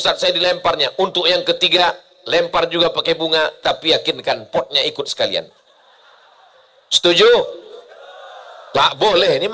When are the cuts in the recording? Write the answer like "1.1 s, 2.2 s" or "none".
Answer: none